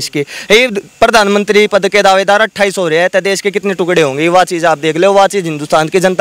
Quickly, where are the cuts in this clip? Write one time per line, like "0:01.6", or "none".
none